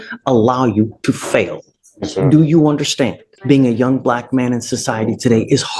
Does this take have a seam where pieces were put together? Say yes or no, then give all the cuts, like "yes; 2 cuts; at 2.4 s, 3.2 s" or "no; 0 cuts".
yes; 1 cut; at 3.3 s